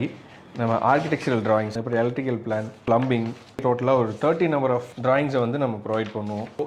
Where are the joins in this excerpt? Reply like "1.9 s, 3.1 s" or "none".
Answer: 1.7 s, 3.6 s